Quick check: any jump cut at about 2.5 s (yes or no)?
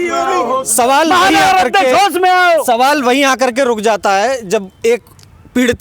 no